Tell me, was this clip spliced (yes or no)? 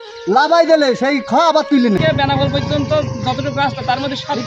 yes